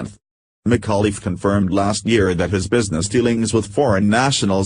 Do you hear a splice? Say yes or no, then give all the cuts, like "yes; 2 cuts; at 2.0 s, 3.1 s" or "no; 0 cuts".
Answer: yes; 1 cut; at 1.6 s